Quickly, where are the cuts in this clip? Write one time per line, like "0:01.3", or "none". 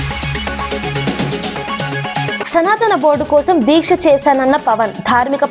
none